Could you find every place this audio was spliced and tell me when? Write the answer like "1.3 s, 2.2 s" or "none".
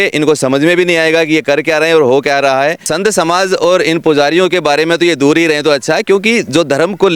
2.9 s

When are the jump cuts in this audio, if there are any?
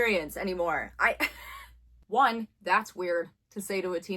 1.9 s

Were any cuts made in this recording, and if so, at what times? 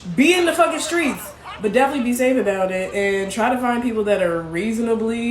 1.2 s, 2.9 s

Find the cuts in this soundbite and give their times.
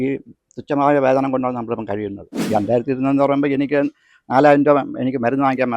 2.4 s

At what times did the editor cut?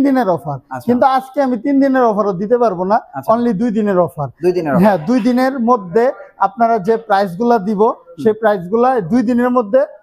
none

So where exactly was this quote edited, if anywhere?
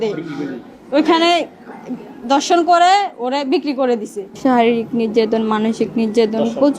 4.4 s

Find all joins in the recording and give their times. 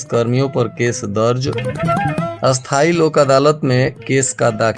none

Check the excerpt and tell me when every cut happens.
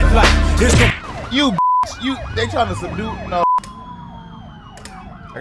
3.4 s

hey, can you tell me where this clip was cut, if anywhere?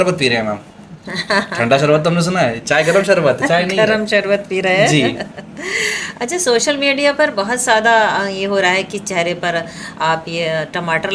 none

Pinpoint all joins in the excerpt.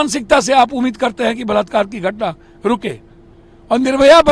none

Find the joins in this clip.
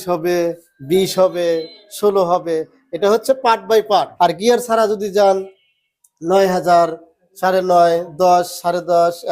4.1 s

